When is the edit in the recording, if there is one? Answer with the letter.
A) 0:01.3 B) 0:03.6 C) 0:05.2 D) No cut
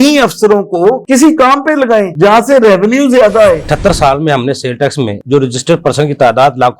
B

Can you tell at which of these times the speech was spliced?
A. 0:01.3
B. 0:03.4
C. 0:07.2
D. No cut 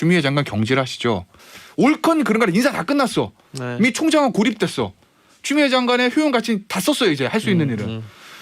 A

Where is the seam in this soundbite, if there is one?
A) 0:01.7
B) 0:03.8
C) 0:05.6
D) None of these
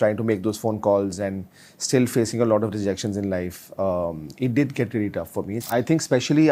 C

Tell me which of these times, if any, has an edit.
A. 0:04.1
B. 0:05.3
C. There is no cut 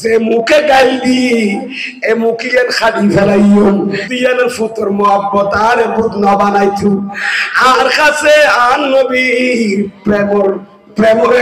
A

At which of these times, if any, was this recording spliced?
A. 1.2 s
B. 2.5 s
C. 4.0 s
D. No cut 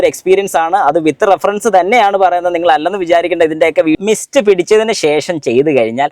C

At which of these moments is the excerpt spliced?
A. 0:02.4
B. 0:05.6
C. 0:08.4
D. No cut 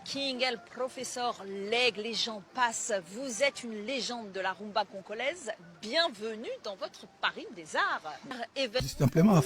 C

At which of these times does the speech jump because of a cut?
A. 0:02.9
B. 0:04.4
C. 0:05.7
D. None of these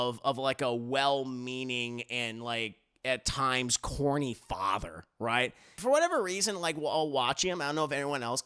C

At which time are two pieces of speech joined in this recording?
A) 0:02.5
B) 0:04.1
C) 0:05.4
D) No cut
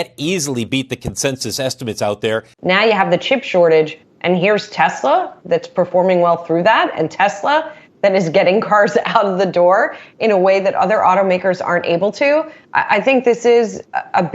A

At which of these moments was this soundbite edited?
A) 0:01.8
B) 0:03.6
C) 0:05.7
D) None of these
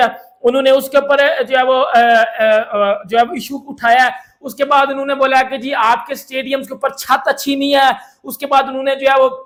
D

